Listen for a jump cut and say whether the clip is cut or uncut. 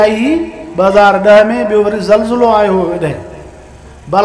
uncut